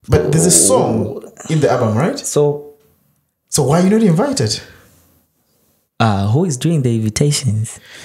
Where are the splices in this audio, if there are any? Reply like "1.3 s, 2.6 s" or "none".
none